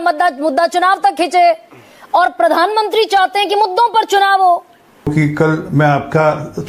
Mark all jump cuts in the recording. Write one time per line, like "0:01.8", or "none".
0:05.1